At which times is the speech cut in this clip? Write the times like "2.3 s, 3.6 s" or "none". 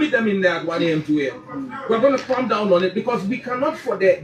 none